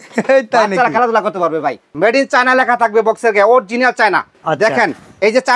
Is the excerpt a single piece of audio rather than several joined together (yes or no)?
no